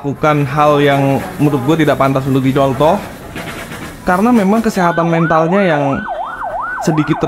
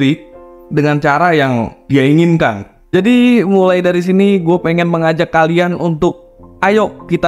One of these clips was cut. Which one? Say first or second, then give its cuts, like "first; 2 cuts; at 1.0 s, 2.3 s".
second; 1 cut; at 2.7 s